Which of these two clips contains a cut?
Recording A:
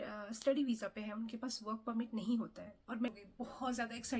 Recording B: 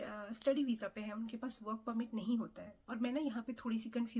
A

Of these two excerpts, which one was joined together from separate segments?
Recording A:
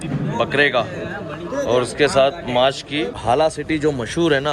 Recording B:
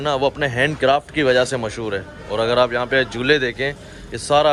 A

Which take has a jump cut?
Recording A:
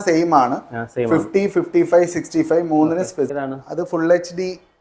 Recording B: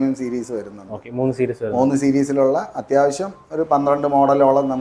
A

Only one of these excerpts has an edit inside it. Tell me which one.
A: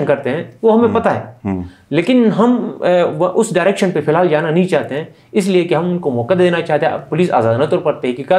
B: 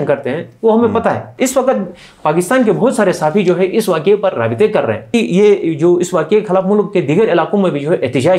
B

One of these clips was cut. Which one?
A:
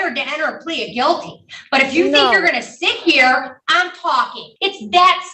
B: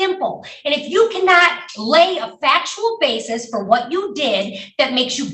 A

